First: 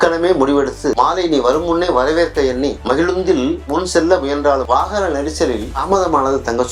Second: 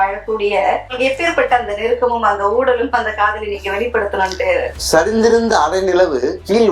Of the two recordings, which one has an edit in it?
second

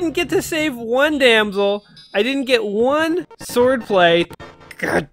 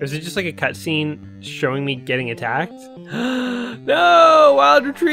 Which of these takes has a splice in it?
first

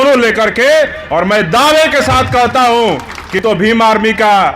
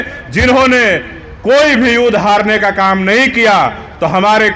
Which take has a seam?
first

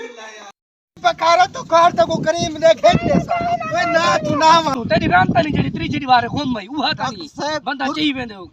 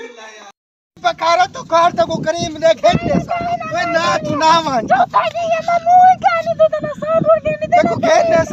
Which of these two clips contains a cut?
first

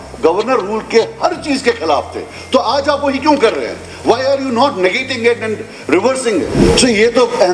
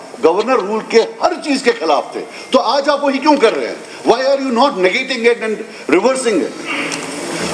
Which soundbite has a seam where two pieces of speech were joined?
first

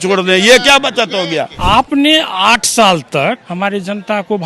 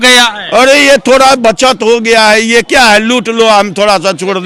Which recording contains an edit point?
first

